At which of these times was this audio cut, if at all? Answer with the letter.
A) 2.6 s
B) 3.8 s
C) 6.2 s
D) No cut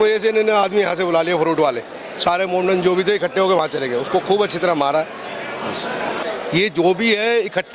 C